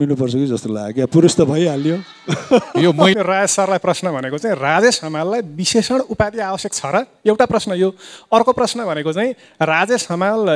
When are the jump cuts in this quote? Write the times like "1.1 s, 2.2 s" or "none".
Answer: 3.1 s